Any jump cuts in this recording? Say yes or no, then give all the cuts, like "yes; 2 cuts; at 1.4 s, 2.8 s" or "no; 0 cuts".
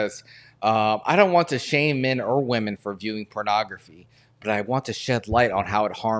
no; 0 cuts